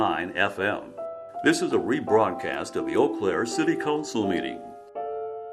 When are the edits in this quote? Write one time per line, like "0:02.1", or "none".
0:04.6